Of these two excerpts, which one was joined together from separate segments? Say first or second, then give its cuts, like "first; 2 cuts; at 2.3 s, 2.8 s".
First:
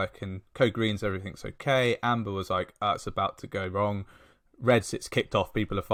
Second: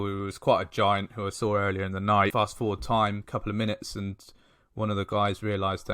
second; 2 cuts; at 2.3 s, 3.2 s